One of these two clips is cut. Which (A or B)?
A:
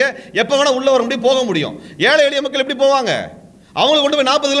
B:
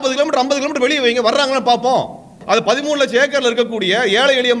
B